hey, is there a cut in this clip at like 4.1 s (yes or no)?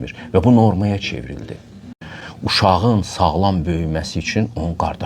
no